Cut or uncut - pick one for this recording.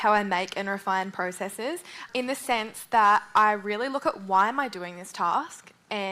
cut